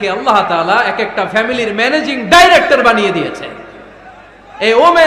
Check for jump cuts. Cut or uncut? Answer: uncut